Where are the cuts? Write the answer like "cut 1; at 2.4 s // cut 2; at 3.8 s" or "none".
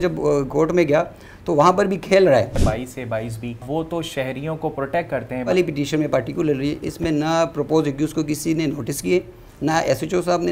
cut 1; at 2.6 s // cut 2; at 3.6 s // cut 3; at 5.5 s